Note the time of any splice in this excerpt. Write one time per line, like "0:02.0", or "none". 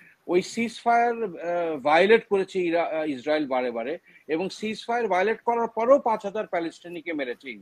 none